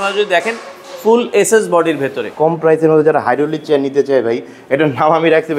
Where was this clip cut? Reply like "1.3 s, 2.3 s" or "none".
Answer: 2.2 s